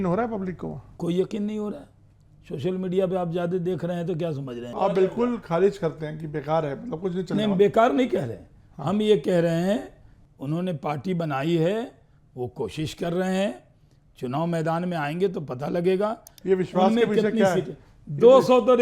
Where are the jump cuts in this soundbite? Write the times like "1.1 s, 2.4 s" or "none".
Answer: 4.7 s, 16.3 s

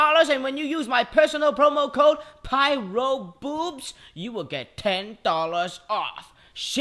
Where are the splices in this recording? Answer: none

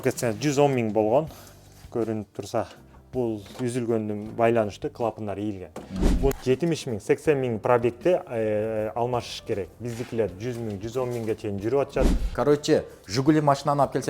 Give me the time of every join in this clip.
6.3 s, 12.3 s

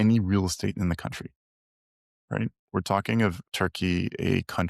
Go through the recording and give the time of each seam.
3.5 s

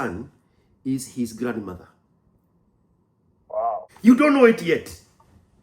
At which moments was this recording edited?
3.9 s

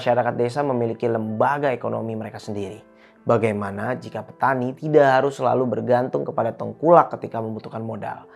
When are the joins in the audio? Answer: none

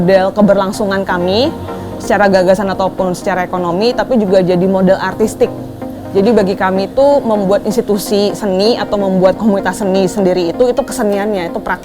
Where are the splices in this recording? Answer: 10.9 s

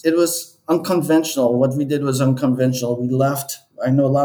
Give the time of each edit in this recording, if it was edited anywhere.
none

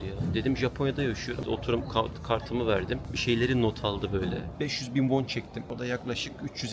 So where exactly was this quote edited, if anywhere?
4.5 s

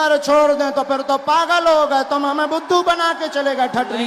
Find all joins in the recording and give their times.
none

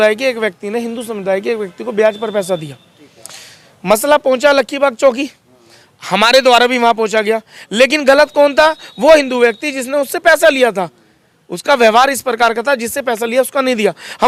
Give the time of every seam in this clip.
none

